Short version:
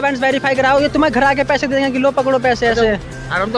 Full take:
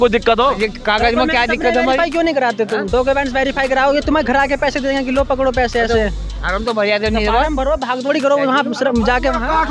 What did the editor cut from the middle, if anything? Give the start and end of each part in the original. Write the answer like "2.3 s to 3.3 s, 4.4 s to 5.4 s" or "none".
none